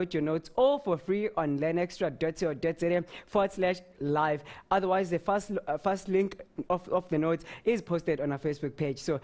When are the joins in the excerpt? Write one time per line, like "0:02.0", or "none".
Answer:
0:02.8

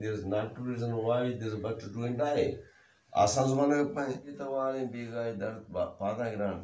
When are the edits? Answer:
0:04.4

